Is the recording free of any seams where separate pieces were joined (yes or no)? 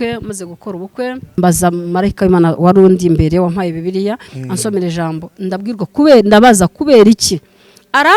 no